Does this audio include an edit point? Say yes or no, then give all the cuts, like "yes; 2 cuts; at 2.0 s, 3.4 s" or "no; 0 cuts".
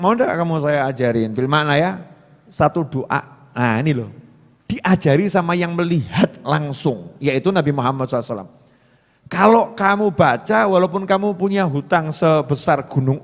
no; 0 cuts